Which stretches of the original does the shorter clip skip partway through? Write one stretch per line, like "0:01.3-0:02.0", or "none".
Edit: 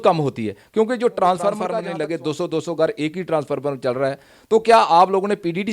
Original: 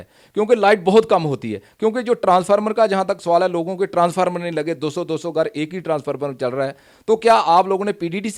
0:02.8-0:04.4